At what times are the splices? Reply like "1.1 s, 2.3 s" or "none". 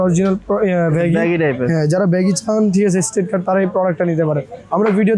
none